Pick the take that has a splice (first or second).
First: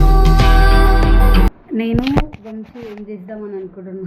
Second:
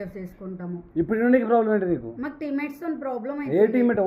first